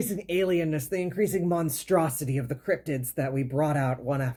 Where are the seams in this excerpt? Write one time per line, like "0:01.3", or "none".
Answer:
none